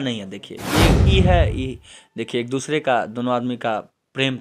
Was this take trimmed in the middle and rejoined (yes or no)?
yes